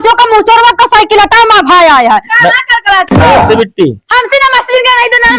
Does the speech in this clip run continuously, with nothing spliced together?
yes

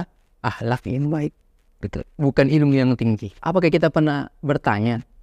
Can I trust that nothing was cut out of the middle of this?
no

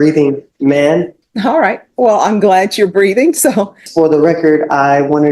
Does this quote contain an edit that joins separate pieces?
yes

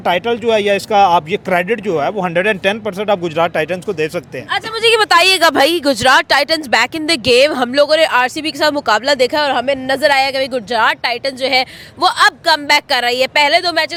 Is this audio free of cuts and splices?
yes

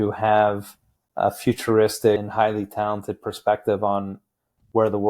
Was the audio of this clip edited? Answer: yes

